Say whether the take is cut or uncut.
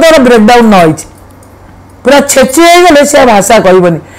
uncut